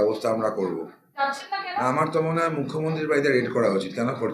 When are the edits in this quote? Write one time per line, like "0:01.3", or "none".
0:01.0